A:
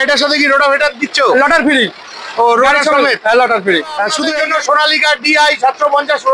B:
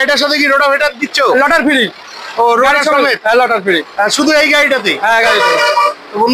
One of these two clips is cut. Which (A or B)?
A